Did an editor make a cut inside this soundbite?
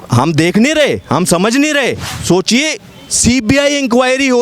yes; 1 cut; at 2.1 s

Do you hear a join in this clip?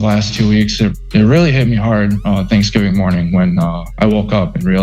no; 0 cuts

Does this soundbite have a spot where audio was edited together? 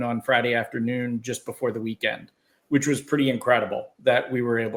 no; 0 cuts

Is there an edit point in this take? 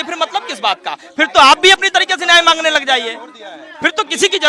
no; 0 cuts

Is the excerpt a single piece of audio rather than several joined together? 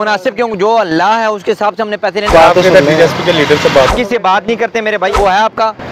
no; 3 cuts; at 2.3 s, 3.9 s, 5.1 s

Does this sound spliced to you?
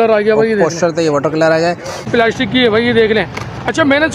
yes; 1 cut; at 2.1 s

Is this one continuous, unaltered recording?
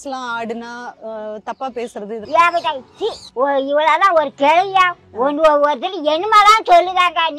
no; 1 cut; at 2.2 s

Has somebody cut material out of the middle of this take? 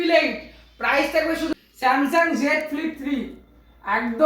yes; 1 cut; at 1.5 s

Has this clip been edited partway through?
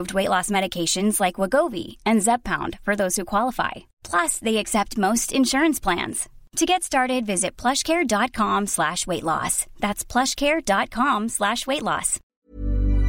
yes; 1 cut; at 12.2 s

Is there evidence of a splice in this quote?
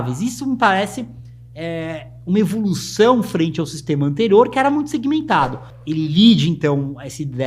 yes; 1 cut; at 5.7 s

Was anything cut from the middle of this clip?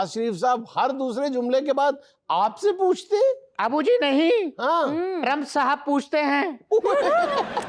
no; 0 cuts

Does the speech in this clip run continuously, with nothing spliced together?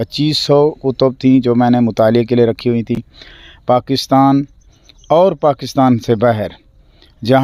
yes; 0 cuts

